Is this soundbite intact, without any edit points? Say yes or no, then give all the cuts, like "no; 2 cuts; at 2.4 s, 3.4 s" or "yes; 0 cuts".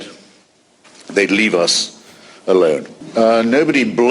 no; 1 cut; at 3.0 s